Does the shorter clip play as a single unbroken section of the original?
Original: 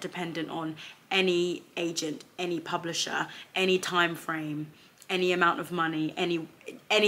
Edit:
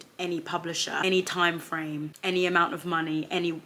no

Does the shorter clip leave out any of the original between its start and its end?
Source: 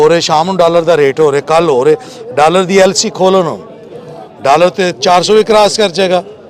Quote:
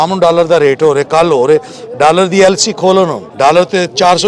yes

